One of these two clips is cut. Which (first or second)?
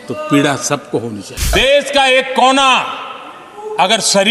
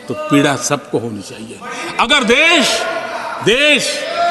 first